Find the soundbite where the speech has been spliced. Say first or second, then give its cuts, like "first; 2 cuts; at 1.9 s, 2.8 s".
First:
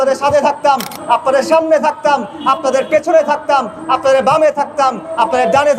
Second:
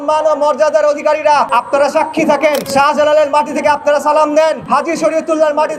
second; 3 cuts; at 1.5 s, 2.7 s, 4.6 s